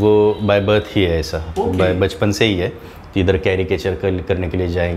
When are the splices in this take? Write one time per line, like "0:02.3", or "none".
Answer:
0:02.9